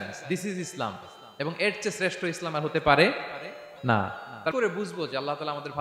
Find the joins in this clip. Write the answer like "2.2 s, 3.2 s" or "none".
4.5 s